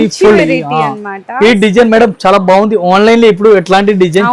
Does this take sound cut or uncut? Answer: uncut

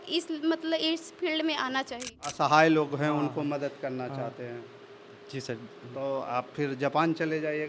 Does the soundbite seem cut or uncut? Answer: cut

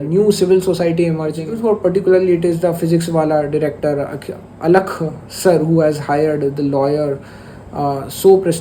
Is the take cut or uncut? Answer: cut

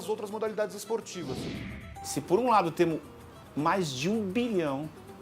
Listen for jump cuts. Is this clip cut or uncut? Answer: cut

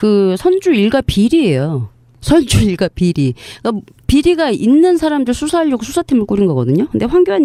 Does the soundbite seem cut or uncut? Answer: uncut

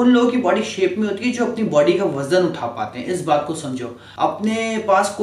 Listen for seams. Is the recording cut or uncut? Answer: cut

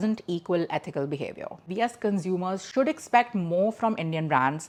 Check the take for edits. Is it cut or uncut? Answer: uncut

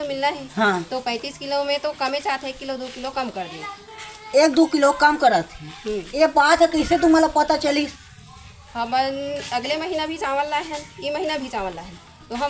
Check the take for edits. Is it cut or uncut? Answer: uncut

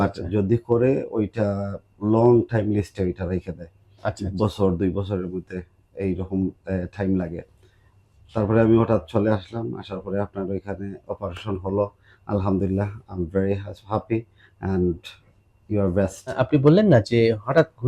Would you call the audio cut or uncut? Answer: uncut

